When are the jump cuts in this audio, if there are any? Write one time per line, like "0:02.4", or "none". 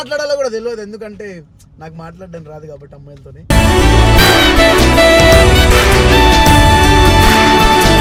none